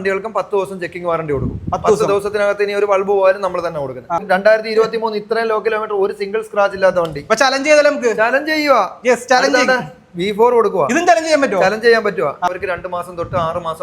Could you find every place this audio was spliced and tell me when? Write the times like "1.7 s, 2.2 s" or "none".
4.2 s, 12.5 s